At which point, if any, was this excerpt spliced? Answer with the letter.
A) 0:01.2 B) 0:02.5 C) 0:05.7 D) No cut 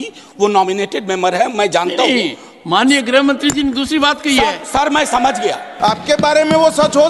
C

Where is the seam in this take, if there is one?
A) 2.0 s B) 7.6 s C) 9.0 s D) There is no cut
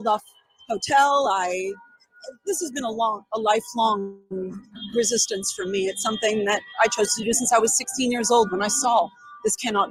D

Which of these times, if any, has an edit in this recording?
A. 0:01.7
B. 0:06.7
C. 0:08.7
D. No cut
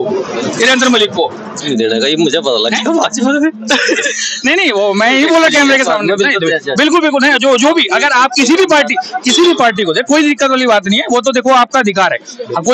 A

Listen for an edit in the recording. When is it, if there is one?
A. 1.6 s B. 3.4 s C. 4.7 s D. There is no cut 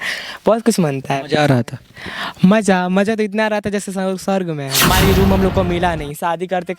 C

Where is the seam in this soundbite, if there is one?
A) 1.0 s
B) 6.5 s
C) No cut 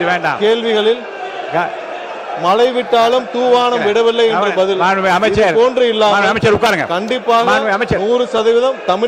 C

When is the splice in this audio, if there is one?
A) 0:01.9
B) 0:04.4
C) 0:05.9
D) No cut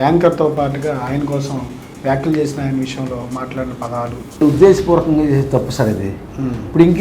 B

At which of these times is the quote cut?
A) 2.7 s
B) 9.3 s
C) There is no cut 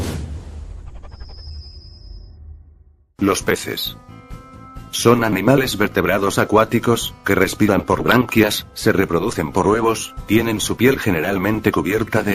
C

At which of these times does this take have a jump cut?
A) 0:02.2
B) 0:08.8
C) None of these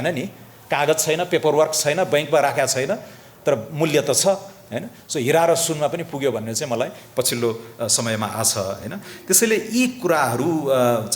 C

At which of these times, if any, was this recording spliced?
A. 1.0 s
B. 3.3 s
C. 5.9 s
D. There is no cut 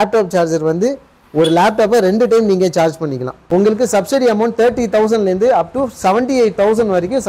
B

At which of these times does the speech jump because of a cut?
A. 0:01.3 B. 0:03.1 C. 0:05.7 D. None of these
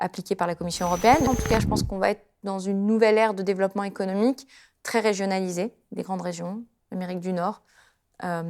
A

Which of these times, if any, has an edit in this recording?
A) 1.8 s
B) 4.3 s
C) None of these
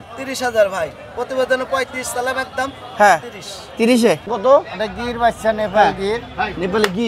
B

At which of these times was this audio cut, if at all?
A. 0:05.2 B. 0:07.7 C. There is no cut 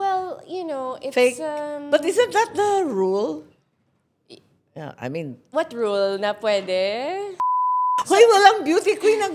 B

